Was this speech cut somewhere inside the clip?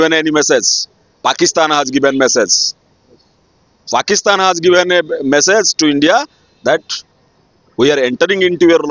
no; 0 cuts

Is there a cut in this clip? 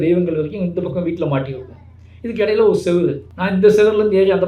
yes; 1 cut; at 3.3 s

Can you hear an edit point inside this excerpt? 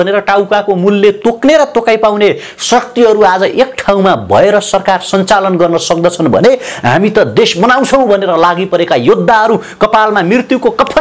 no; 0 cuts

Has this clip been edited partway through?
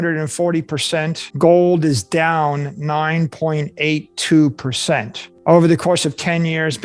yes; 1 cut; at 1.2 s

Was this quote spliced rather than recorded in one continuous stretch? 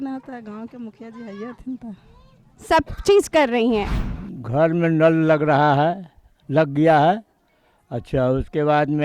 yes; 1 cut; at 4.0 s

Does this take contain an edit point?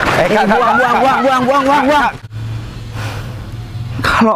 yes; 1 cut; at 2.2 s

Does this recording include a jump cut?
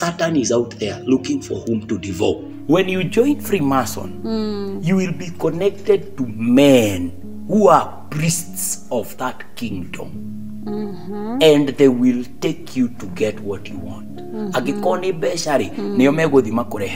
yes; 1 cut; at 2.5 s

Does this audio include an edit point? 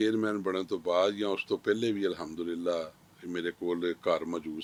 no; 0 cuts

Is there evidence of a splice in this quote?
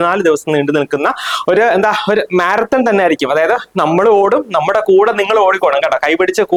no; 0 cuts

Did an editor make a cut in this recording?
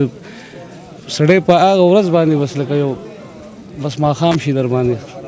no; 0 cuts

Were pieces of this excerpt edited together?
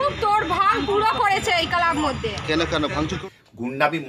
yes; 1 cut; at 3.2 s

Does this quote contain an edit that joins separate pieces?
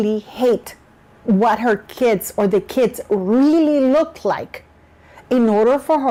no; 0 cuts

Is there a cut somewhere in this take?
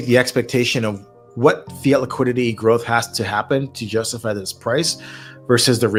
no; 0 cuts

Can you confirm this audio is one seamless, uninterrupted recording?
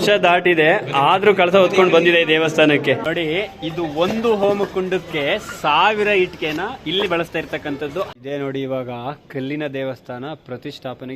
no; 2 cuts; at 3.0 s, 8.1 s

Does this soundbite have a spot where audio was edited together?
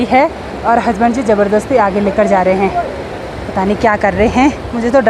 no; 0 cuts

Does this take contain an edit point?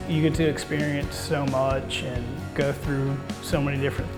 no; 0 cuts

